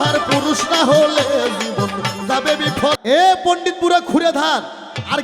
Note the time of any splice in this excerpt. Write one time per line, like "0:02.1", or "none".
0:03.0